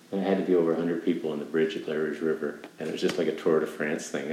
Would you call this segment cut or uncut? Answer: uncut